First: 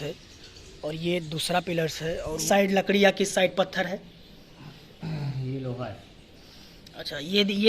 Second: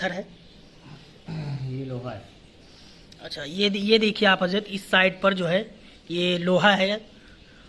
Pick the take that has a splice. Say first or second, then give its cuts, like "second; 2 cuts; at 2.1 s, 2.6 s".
first; 1 cut; at 2.4 s